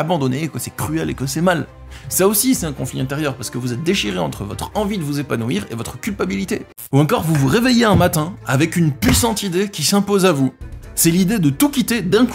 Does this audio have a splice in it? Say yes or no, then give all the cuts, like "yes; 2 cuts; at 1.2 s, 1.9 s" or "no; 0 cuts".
yes; 1 cut; at 6.8 s